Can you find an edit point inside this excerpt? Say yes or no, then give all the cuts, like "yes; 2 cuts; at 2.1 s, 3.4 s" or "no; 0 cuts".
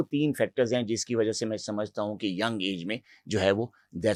no; 0 cuts